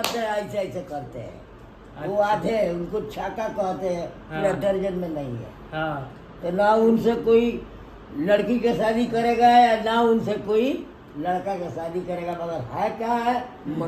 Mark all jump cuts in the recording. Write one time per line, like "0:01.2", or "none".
none